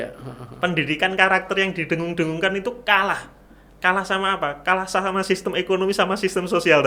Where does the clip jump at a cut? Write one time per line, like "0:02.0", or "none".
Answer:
none